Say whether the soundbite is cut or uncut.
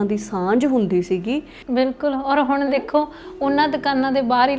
cut